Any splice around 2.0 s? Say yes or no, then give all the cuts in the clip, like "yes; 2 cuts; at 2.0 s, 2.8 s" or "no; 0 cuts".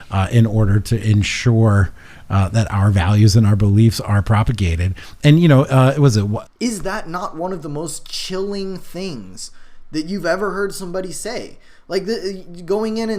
no; 1 cut; at 6.4 s